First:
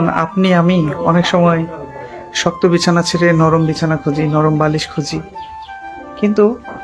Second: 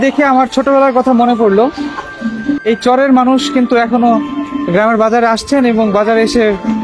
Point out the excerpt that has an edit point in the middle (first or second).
second